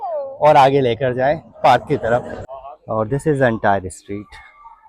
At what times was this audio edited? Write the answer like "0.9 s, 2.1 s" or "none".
2.4 s